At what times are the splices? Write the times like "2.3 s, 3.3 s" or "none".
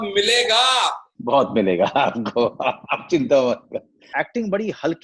1.1 s, 4.1 s